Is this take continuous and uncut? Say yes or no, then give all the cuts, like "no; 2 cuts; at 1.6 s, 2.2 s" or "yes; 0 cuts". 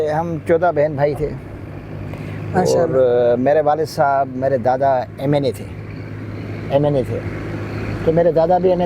yes; 0 cuts